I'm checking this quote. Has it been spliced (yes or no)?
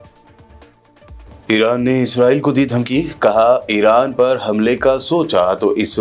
yes